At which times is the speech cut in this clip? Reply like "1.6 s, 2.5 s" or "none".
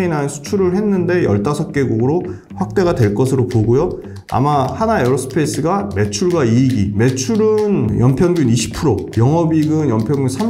none